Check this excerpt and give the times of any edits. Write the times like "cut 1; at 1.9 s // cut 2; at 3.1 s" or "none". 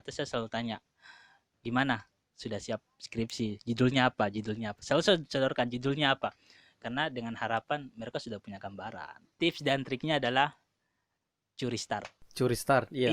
cut 1; at 9.3 s // cut 2; at 12.2 s